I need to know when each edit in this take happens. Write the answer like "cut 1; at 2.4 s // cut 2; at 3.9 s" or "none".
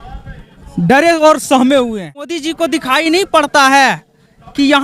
cut 1; at 2.4 s